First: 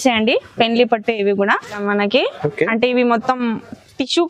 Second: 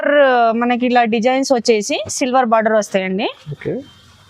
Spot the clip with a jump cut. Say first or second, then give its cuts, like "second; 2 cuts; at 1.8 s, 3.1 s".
first; 1 cut; at 1.8 s